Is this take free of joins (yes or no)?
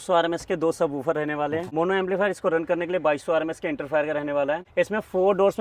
no